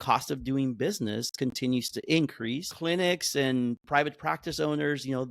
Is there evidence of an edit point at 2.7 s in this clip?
yes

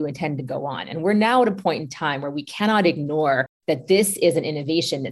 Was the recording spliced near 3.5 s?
yes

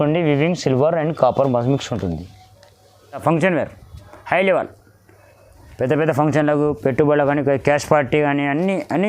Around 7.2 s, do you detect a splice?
no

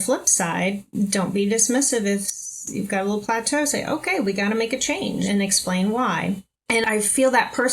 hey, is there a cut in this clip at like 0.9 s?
no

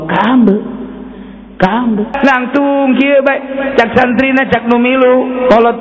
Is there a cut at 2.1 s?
yes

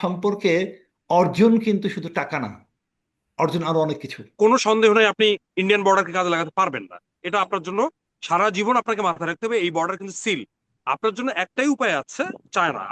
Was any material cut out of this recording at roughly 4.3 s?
yes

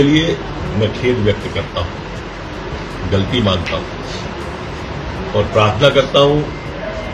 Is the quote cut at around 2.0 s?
no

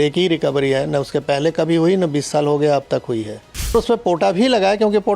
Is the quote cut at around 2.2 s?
no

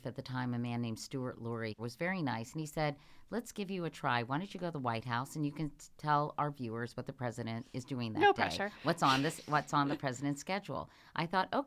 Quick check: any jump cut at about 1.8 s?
yes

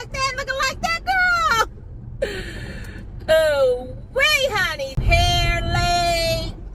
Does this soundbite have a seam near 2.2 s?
no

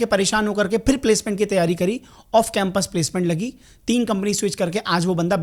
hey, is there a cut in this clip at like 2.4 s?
no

